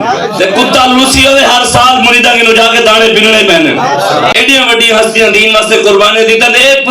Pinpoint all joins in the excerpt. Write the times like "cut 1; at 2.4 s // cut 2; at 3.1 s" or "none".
cut 1; at 4.3 s